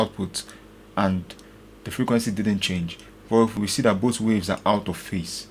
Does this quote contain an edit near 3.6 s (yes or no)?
yes